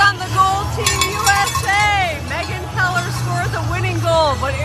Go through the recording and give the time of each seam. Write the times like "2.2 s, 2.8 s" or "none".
none

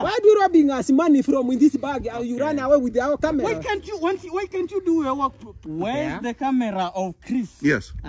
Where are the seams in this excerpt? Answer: 5.5 s

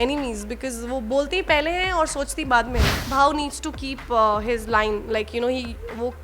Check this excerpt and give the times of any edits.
3.0 s

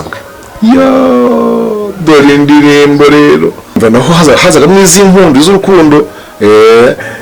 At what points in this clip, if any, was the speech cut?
3.8 s

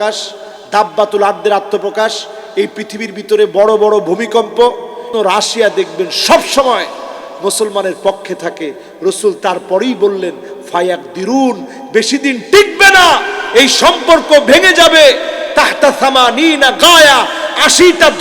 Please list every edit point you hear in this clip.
5.1 s

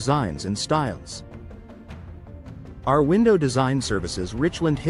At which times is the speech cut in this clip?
none

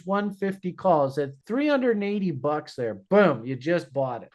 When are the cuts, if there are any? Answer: 1.4 s

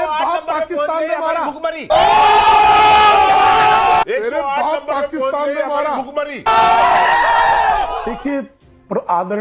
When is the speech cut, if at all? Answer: 8.0 s

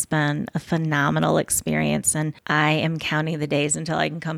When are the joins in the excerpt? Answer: 2.4 s

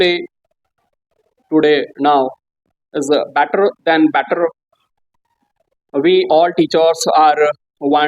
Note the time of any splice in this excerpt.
none

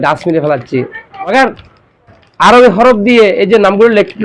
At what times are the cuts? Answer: 1.3 s

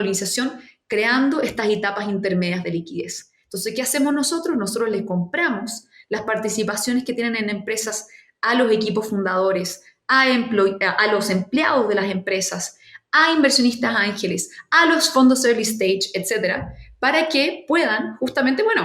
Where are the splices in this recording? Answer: none

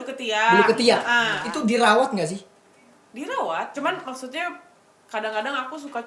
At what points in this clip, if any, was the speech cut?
1.4 s, 3.7 s

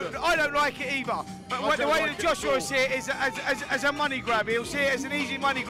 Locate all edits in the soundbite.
none

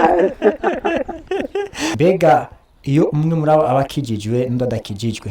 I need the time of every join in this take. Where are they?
1.9 s

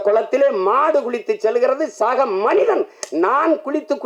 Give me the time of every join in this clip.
none

